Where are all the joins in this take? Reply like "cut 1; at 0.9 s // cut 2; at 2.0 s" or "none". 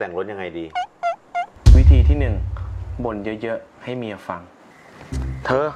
cut 1; at 1.5 s

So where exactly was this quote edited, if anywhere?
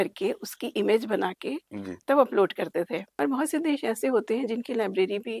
cut 1; at 3.0 s

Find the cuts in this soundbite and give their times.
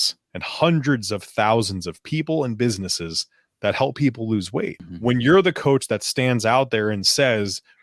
cut 1; at 4.8 s

